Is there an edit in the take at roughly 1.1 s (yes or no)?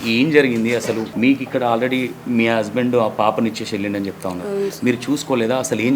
yes